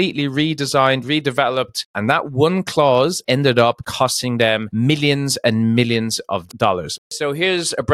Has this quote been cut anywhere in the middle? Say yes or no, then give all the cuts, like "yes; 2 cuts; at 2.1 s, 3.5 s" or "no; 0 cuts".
yes; 2 cuts; at 1.9 s, 7.0 s